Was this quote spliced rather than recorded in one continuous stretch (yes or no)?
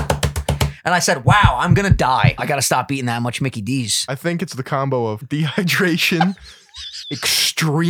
yes